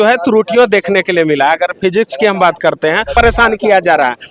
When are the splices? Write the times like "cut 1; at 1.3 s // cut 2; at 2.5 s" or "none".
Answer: cut 1; at 3.1 s